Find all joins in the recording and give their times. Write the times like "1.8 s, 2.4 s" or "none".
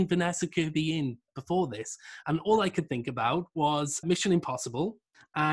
1.2 s, 4.0 s